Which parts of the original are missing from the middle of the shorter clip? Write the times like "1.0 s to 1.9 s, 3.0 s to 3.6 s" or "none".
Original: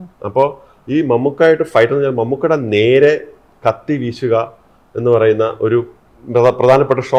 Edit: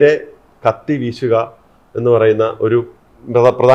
none